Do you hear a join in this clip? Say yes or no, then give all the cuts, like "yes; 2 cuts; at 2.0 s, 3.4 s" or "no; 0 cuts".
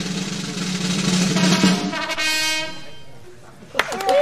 no; 0 cuts